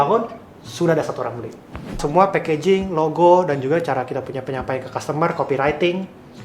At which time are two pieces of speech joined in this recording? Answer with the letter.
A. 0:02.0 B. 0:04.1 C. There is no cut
A